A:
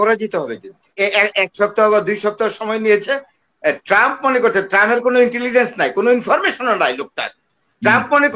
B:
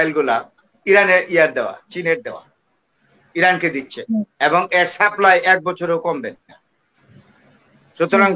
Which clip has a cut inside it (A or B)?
A